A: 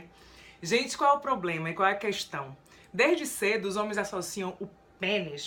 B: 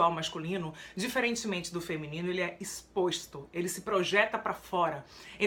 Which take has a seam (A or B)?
B